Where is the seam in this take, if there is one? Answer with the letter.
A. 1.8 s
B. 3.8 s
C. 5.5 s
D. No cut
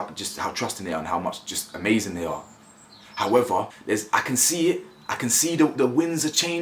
B